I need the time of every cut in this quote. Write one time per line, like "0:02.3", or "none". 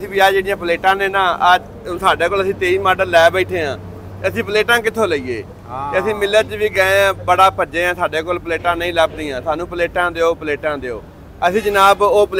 none